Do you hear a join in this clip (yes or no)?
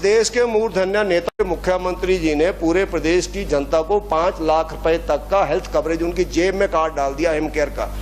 yes